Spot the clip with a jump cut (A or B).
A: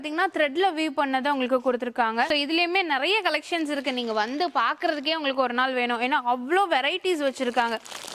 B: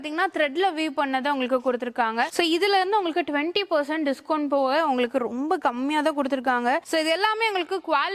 B